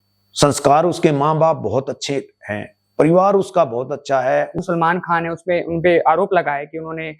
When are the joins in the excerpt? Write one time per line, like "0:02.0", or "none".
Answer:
0:04.6